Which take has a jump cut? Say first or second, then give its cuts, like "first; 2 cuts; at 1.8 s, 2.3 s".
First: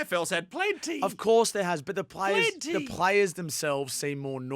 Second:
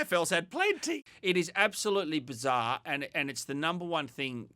second; 1 cut; at 1.0 s